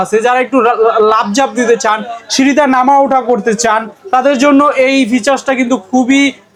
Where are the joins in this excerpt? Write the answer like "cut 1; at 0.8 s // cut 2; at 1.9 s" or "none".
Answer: none